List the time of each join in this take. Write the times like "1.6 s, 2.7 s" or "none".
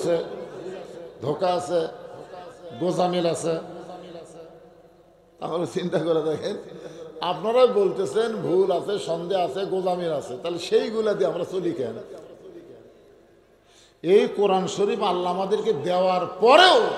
none

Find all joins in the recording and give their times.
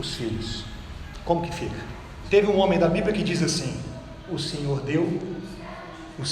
1.0 s, 2.1 s

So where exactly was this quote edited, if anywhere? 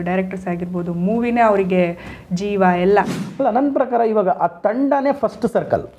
3.2 s

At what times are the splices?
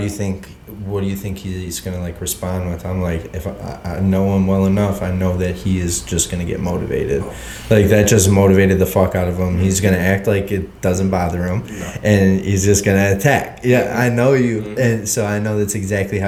none

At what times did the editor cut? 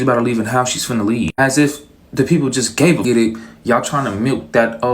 3.0 s

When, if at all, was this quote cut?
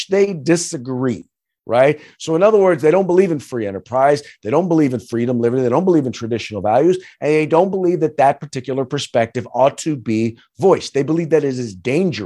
none

